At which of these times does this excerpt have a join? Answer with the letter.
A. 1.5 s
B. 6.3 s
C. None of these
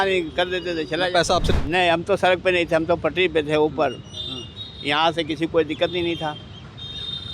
A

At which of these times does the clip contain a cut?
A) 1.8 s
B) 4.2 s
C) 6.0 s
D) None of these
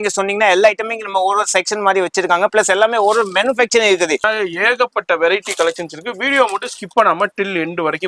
B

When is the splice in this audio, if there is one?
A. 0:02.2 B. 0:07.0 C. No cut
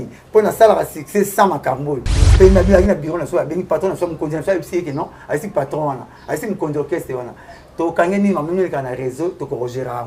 A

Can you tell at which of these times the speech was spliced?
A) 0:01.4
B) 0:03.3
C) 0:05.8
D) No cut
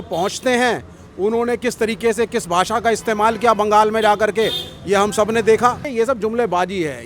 C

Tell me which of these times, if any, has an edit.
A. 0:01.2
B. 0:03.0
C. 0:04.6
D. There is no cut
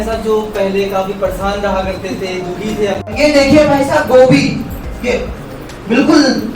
B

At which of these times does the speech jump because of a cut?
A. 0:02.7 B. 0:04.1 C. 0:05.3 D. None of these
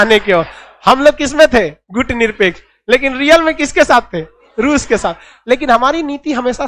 D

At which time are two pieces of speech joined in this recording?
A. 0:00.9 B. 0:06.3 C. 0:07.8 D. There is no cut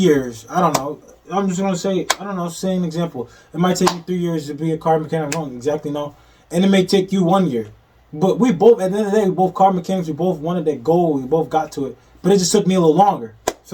D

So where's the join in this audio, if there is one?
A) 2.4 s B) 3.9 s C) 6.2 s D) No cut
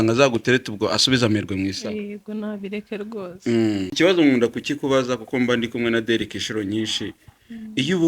B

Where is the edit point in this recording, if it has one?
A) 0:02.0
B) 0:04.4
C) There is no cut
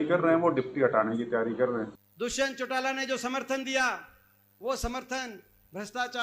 A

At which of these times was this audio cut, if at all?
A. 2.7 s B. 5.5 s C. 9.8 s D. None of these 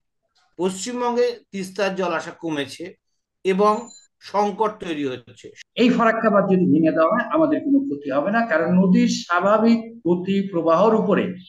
B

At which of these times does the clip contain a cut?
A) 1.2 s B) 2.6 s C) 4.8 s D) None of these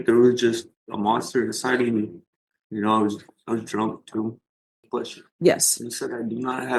C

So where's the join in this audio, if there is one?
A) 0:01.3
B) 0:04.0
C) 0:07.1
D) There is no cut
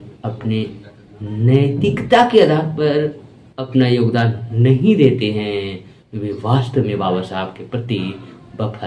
D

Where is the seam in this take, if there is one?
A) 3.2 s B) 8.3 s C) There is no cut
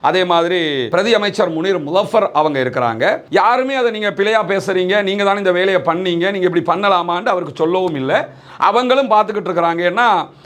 A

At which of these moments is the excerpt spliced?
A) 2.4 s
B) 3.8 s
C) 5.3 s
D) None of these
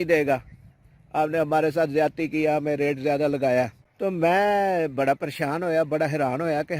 B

